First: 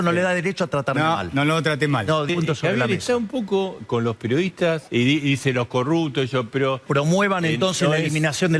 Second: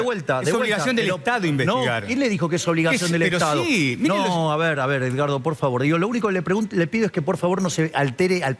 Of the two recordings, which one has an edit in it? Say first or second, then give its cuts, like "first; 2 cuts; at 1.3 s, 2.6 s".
first; 3 cuts; at 2.3 s, 4.8 s, 6.8 s